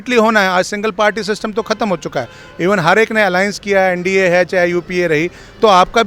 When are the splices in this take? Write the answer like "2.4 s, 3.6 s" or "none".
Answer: none